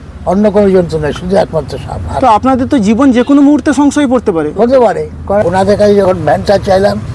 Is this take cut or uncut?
cut